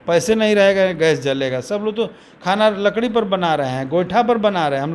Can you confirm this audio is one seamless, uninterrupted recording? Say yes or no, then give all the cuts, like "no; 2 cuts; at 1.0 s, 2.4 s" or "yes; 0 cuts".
yes; 0 cuts